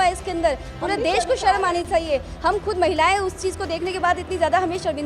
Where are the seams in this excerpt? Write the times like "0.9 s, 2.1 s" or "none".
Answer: none